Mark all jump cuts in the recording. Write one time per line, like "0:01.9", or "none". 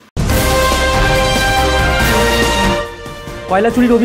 0:02.6